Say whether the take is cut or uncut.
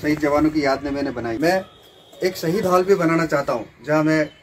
cut